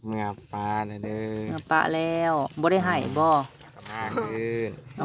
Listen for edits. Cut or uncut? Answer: cut